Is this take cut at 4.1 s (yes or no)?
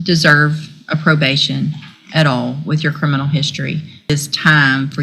yes